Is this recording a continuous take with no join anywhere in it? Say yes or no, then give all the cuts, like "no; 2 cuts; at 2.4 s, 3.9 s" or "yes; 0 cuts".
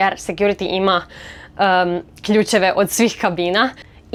yes; 0 cuts